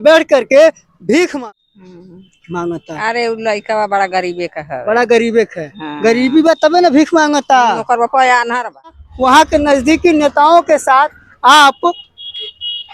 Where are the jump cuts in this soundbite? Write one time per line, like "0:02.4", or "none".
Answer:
0:01.3
0:09.0

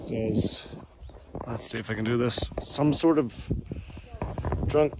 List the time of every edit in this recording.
0:02.6

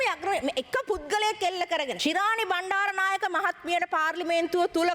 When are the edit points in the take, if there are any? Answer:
0:01.9

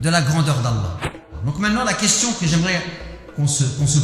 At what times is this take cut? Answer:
0:01.1

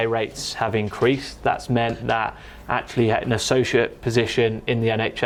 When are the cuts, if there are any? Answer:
none

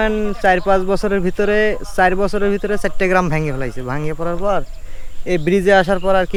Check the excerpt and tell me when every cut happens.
none

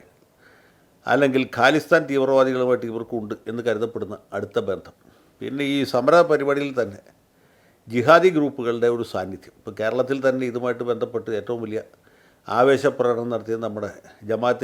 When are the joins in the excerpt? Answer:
none

